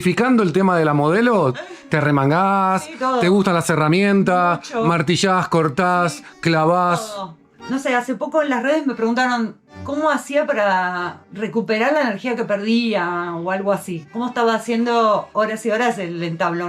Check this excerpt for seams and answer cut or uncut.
uncut